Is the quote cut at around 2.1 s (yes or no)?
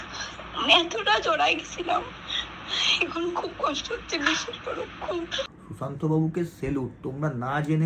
no